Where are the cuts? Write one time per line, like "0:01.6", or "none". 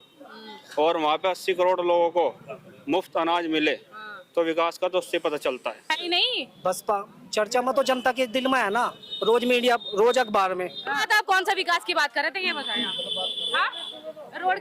0:06.0
0:11.0